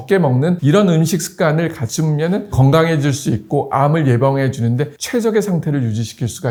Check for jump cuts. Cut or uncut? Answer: uncut